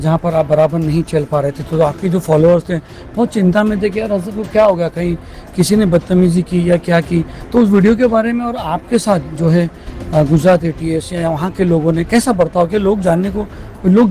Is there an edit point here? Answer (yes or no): no